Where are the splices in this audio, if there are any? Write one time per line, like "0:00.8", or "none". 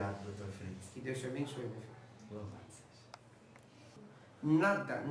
0:04.0

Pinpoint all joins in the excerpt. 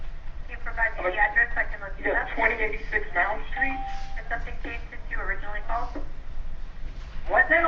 0:04.1

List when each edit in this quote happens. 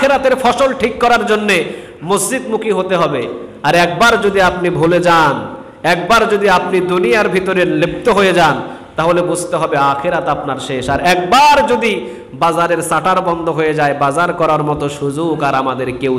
none

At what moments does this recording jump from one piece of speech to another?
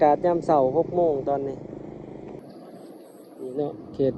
0:02.4

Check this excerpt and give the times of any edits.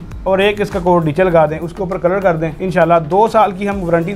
0:02.5

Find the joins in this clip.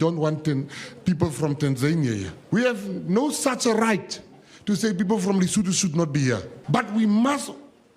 0:02.3
0:06.5

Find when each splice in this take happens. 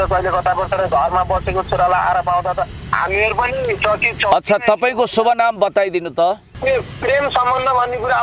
0:06.5

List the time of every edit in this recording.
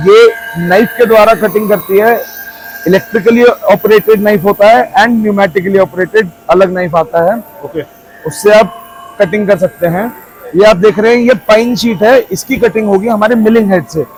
none

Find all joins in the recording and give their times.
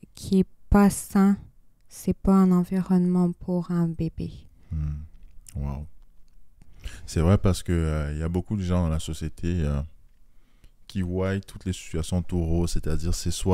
none

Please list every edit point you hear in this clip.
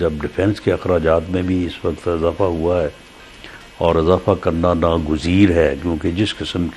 none

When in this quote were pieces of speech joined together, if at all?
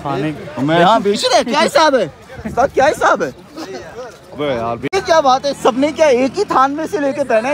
0:04.9

